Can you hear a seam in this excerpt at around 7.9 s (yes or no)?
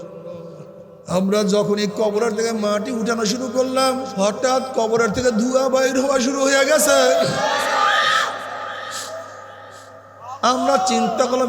no